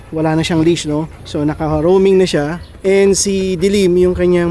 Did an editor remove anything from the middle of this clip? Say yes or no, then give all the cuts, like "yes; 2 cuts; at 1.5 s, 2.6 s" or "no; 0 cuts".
yes; 2 cuts; at 1.2 s, 2.6 s